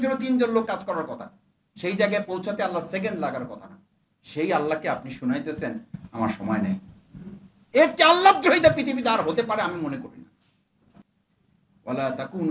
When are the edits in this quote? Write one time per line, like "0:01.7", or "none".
0:07.6
0:11.0

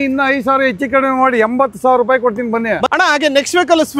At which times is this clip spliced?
0:02.9

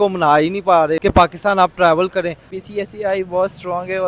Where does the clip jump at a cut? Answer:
0:01.0
0:02.5

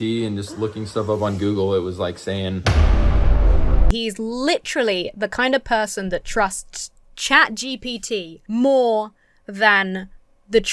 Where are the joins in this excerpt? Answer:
0:02.6
0:03.9
0:08.4

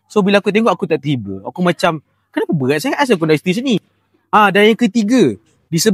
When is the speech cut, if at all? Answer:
none

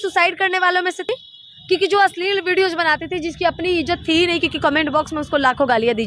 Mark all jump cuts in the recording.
0:01.1

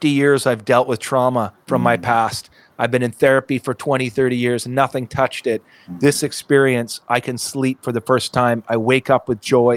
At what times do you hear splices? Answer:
none

